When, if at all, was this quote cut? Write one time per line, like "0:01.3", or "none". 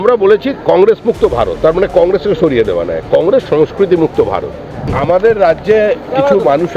0:04.9